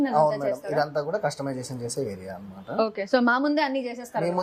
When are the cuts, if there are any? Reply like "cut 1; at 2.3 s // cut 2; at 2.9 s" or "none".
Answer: none